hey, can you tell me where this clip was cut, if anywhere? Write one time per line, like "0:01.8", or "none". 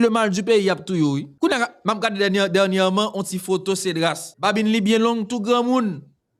0:01.3
0:04.3